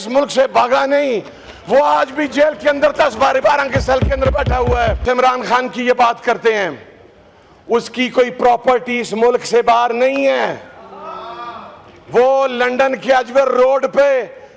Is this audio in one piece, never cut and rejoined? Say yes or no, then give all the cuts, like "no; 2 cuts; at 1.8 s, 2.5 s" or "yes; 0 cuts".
no; 1 cut; at 5.0 s